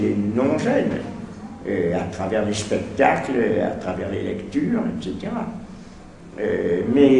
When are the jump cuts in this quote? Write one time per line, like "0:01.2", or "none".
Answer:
none